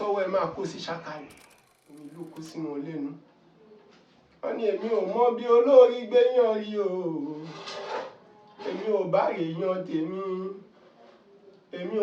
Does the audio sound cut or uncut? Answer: cut